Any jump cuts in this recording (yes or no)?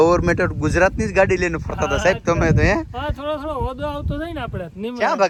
no